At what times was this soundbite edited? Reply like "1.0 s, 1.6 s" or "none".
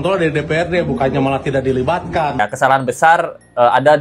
2.4 s